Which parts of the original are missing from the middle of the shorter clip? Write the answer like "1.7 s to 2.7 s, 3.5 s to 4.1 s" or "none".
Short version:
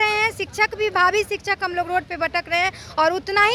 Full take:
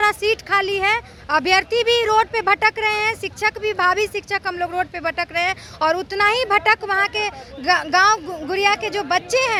none